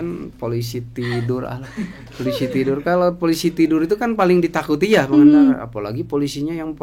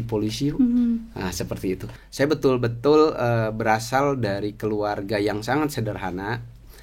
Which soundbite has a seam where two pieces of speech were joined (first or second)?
second